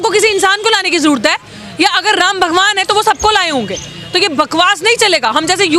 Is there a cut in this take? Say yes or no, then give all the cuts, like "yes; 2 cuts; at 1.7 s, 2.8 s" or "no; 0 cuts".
no; 0 cuts